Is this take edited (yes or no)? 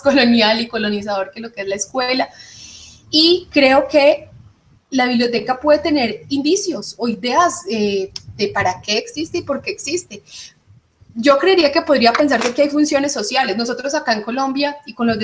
no